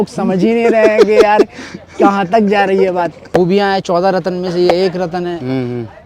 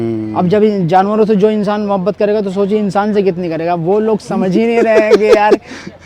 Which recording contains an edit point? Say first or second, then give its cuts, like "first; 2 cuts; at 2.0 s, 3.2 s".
first; 1 cut; at 3.3 s